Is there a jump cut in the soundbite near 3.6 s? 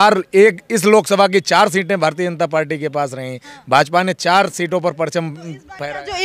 no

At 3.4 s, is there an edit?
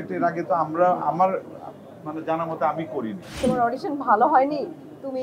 yes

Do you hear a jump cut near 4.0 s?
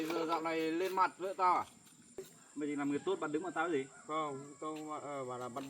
no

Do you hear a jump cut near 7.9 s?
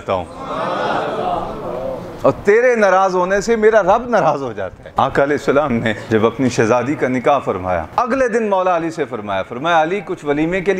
yes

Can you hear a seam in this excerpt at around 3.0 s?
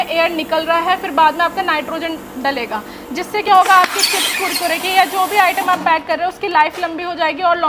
no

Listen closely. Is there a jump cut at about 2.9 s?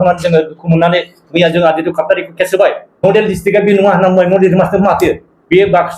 yes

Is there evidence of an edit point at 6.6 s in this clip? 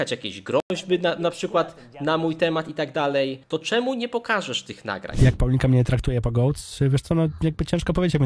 no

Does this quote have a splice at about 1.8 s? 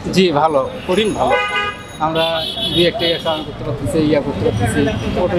no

